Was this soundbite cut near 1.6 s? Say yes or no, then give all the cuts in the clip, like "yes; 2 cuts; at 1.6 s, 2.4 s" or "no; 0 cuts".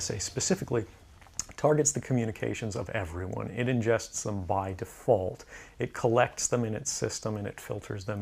no; 1 cut; at 6.4 s